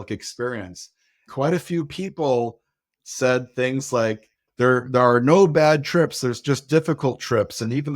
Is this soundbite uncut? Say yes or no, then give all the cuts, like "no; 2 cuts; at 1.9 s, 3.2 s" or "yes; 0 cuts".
no; 2 cuts; at 1.3 s, 4.5 s